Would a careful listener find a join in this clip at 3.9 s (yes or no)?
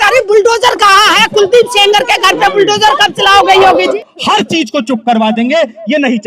yes